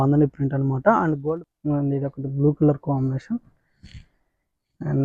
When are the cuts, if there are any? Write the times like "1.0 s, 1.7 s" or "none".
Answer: 1.2 s

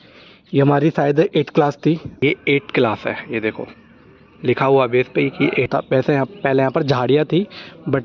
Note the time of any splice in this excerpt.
2.1 s, 5.7 s

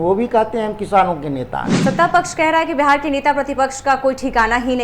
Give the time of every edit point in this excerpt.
1.7 s

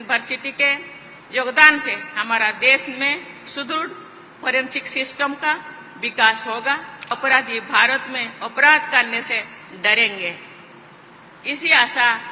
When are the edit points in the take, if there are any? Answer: 7.1 s

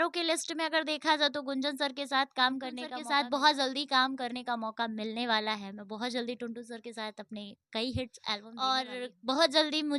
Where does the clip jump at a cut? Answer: 2.9 s, 8.5 s

